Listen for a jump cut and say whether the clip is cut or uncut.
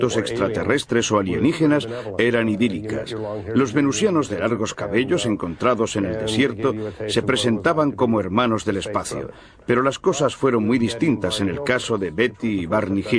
uncut